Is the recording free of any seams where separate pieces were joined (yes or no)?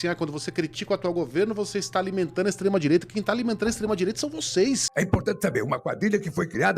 no